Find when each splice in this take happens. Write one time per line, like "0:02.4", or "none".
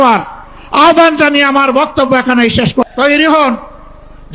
0:02.9